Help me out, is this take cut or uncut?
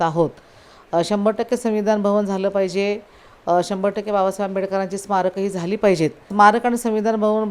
cut